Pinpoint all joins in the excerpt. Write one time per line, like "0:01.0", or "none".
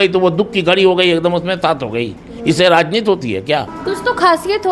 0:03.7